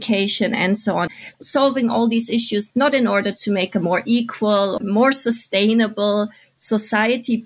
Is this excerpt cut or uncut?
cut